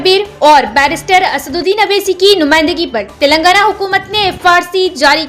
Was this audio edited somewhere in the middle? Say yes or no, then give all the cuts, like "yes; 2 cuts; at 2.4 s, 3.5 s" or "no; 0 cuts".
no; 0 cuts